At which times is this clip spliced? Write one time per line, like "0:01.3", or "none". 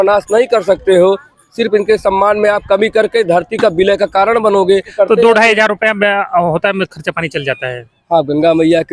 0:04.9